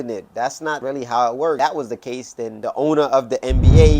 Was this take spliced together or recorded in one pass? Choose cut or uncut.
cut